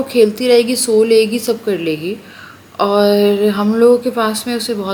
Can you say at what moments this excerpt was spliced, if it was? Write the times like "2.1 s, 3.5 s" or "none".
none